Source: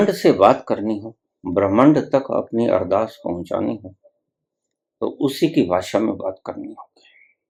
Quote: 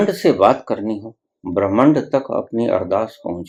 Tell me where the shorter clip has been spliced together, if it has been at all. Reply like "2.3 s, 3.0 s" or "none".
none